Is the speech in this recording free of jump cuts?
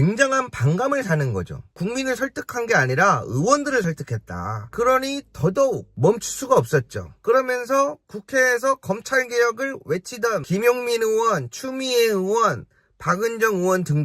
no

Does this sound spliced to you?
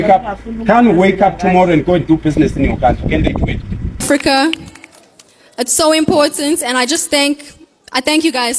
yes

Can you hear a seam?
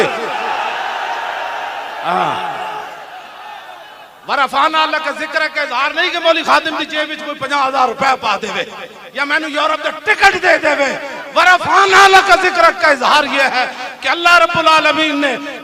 yes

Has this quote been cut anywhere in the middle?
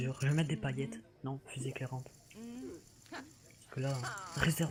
no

